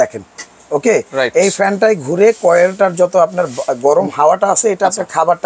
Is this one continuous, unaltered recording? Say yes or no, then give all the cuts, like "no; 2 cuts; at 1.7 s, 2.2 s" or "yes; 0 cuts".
yes; 0 cuts